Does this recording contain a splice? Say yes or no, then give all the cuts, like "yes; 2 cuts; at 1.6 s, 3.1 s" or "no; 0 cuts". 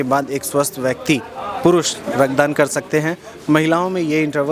no; 0 cuts